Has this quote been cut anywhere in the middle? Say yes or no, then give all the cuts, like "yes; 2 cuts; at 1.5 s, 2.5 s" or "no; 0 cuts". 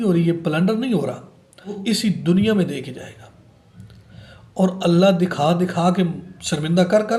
yes; 1 cut; at 1.8 s